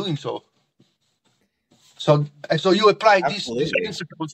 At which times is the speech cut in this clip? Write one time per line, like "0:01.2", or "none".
0:02.4